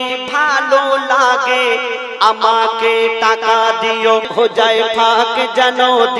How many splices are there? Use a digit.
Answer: 1